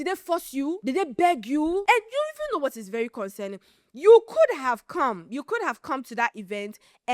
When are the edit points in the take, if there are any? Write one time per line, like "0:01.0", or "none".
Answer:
0:00.8
0:01.8